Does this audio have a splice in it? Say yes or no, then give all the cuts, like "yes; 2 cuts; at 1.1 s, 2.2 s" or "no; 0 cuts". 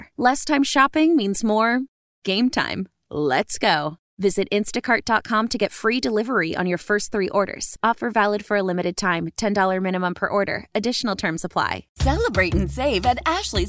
yes; 1 cut; at 11.9 s